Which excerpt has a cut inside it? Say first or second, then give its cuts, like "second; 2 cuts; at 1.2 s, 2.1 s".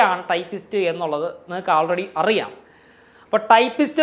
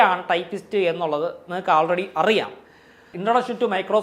second; 1 cut; at 3.1 s